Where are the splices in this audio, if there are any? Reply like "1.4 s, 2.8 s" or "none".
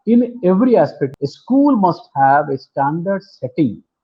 1.0 s